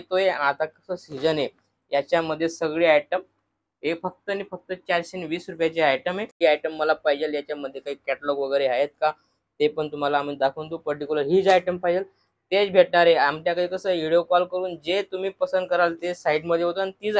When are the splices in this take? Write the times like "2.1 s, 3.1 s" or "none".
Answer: 6.3 s